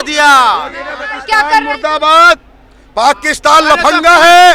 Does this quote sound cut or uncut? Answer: cut